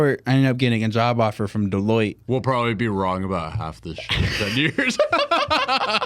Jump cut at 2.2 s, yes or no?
yes